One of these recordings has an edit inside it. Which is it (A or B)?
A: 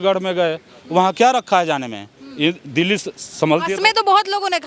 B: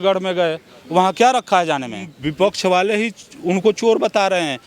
B